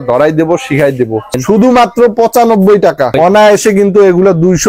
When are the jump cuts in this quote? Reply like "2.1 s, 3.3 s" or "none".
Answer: 1.4 s, 3.1 s